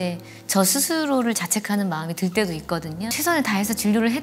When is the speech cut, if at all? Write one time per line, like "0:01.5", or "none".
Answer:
0:03.1